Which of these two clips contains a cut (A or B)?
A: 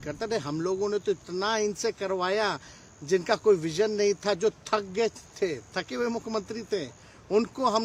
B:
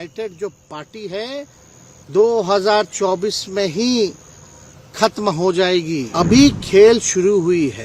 B